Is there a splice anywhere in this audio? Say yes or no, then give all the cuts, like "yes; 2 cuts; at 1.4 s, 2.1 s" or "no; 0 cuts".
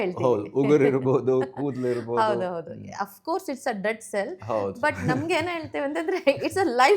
no; 0 cuts